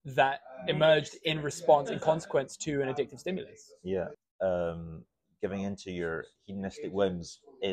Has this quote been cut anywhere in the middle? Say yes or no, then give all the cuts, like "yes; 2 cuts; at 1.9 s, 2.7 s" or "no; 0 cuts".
yes; 1 cut; at 4.2 s